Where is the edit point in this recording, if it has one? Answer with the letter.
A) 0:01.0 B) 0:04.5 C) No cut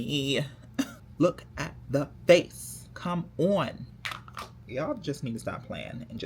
A